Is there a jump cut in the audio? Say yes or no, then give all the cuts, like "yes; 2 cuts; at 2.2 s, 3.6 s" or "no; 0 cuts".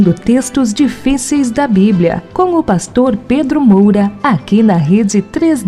no; 0 cuts